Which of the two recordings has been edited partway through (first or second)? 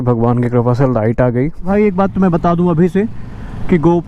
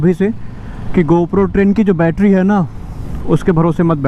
first